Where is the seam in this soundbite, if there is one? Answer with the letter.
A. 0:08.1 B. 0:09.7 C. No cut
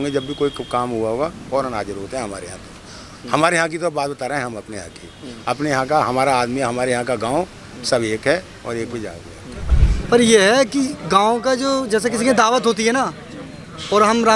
B